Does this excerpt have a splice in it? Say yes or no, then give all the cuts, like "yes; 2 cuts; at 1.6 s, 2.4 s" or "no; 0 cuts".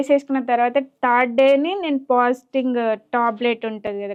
no; 0 cuts